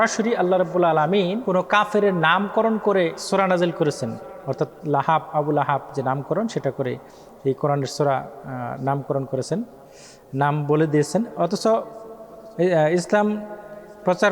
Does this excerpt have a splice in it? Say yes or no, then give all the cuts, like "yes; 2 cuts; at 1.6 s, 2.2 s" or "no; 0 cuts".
yes; 2 cuts; at 1.4 s, 3.2 s